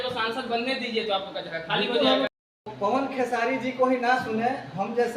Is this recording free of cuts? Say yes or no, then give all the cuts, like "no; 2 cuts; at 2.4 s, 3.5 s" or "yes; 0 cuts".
no; 1 cut; at 2.6 s